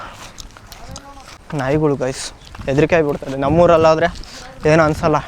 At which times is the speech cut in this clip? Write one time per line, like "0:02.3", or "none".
0:01.4